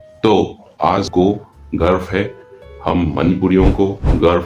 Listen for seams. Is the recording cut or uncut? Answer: cut